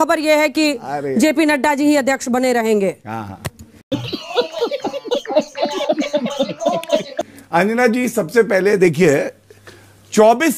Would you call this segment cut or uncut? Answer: uncut